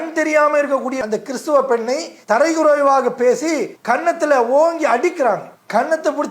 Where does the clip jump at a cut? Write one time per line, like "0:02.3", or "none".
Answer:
0:01.0